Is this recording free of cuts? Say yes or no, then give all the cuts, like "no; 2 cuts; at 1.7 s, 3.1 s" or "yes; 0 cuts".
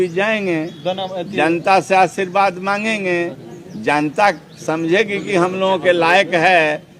yes; 0 cuts